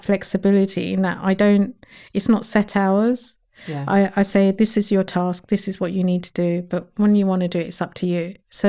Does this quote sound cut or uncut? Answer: uncut